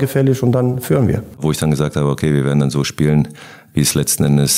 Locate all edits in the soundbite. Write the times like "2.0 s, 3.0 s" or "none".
1.3 s